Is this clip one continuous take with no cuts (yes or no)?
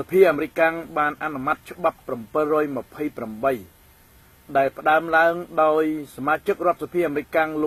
yes